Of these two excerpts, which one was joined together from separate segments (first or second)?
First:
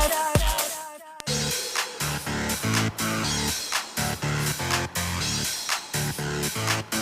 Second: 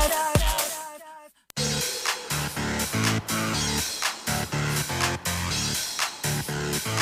first